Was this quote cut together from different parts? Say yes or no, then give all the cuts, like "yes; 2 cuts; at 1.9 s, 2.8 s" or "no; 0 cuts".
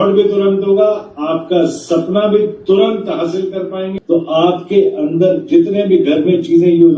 yes; 1 cut; at 3.9 s